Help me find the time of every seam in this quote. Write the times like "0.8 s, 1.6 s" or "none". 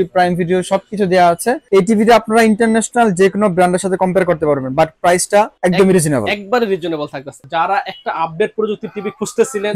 1.6 s, 5.5 s, 7.4 s